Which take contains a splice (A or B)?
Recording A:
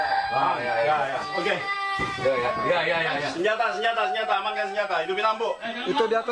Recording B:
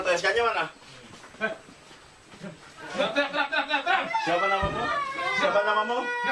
B